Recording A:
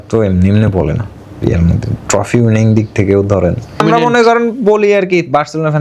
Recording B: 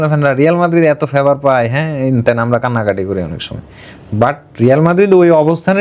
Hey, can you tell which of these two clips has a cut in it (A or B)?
A